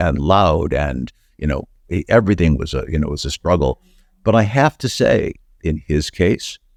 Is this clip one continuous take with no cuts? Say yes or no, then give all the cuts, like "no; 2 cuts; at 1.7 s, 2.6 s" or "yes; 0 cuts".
yes; 0 cuts